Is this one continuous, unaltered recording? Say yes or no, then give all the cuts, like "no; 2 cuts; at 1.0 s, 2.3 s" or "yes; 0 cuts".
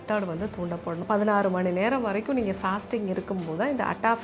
no; 1 cut; at 1.0 s